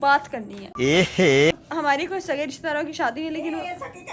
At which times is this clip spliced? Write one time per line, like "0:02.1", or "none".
0:01.5